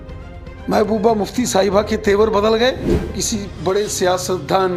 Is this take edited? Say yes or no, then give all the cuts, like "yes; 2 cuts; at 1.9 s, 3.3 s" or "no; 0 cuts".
yes; 1 cut; at 3.2 s